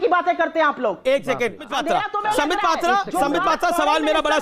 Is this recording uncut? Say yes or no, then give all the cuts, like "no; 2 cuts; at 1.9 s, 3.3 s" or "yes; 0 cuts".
no; 1 cut; at 1.7 s